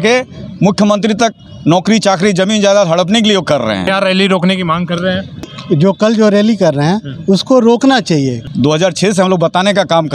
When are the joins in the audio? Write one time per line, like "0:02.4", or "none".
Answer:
0:03.9
0:05.5
0:08.4